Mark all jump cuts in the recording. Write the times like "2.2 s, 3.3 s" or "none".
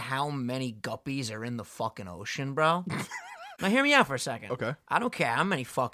3.5 s